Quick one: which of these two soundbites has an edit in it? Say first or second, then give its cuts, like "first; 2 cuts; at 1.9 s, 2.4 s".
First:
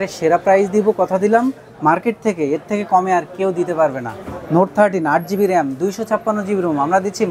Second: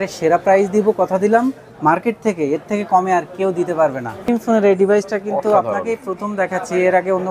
second; 1 cut; at 4.3 s